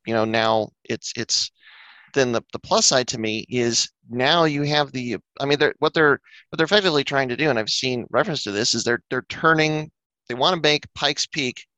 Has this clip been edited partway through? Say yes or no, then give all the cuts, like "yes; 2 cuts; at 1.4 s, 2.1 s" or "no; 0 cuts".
yes; 1 cut; at 2.0 s